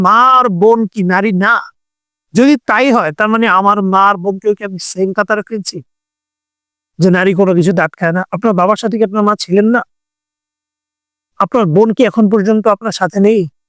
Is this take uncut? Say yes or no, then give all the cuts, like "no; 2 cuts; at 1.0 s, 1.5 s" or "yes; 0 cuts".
yes; 0 cuts